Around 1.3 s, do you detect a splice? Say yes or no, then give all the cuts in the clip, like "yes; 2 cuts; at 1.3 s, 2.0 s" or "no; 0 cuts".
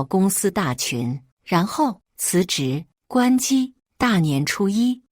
yes; 1 cut; at 1.3 s